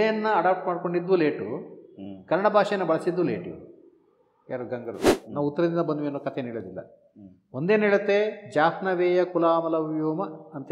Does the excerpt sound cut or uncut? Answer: cut